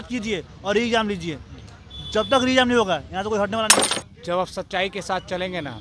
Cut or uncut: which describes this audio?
cut